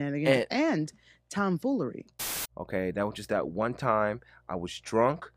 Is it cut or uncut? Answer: cut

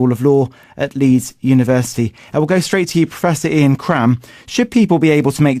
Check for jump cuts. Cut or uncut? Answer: cut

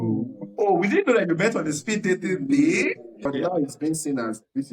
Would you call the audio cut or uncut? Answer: cut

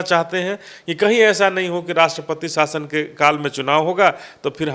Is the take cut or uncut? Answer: uncut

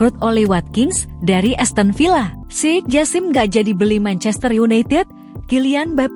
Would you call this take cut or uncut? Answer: cut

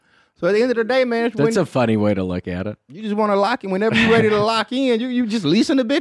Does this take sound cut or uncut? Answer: uncut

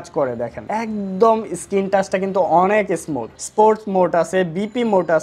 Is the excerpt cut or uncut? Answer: cut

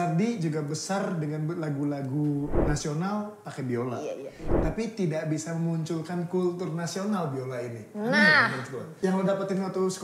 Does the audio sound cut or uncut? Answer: cut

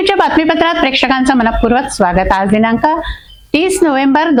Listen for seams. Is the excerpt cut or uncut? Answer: uncut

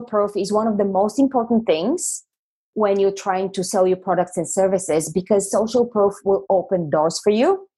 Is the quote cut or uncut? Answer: uncut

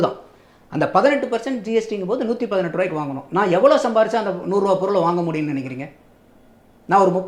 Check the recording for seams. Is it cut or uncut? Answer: uncut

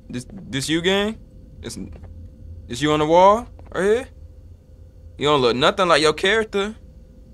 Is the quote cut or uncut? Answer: uncut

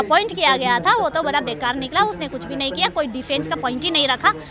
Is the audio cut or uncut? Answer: uncut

